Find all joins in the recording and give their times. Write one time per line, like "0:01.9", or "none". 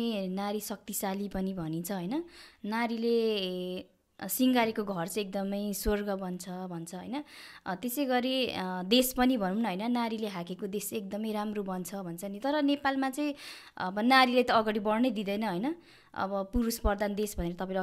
none